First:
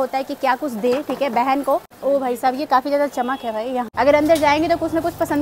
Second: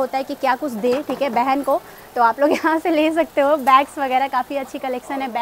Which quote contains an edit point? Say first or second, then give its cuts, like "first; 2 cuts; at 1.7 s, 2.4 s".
first; 2 cuts; at 1.9 s, 3.9 s